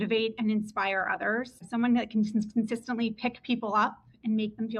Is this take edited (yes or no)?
yes